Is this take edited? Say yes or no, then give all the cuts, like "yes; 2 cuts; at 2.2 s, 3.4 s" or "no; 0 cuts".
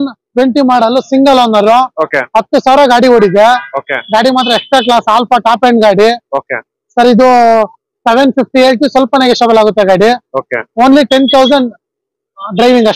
no; 0 cuts